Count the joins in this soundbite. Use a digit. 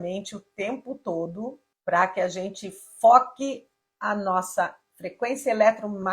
1